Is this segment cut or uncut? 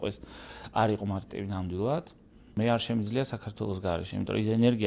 cut